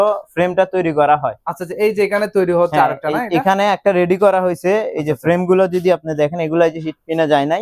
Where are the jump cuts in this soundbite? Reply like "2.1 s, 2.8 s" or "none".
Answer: none